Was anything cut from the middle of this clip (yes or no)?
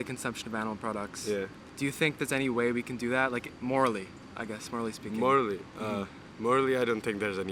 no